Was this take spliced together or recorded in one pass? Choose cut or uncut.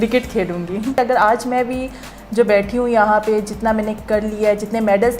cut